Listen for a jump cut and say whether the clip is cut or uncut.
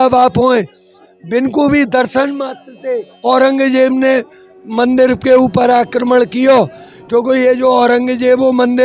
cut